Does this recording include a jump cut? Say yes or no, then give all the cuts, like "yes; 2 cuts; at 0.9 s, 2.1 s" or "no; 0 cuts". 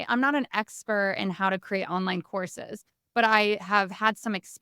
no; 0 cuts